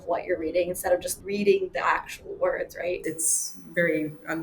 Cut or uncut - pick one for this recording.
cut